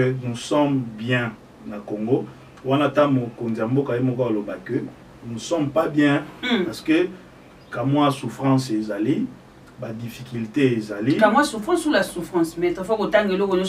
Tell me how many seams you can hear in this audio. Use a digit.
0